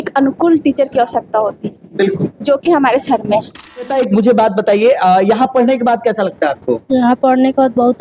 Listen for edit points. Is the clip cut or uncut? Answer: cut